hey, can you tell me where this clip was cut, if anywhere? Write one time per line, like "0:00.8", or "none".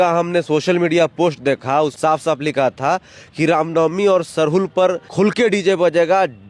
0:02.0
0:05.0